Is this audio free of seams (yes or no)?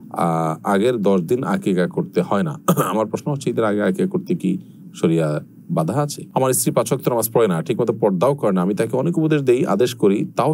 no